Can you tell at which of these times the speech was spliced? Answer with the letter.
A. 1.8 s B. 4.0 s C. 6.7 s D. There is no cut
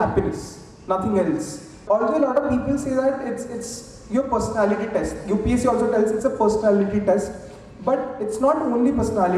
A